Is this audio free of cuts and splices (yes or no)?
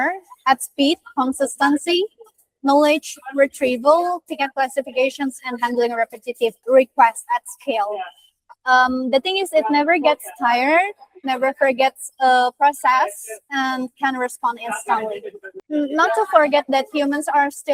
yes